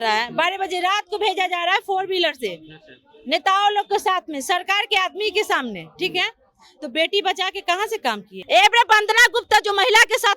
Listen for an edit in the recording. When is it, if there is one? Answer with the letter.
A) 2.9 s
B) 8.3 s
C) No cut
B